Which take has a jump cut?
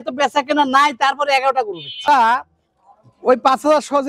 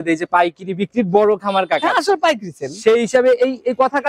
first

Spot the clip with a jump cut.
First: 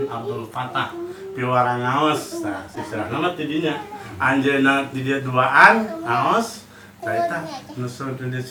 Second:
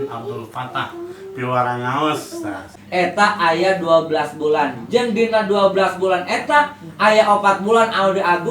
second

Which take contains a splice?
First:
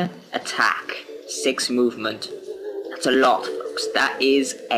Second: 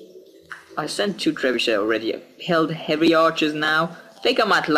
first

